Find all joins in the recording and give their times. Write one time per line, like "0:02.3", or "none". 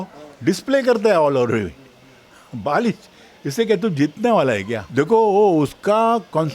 0:04.8